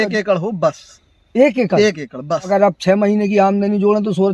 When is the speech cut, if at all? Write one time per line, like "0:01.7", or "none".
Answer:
0:02.5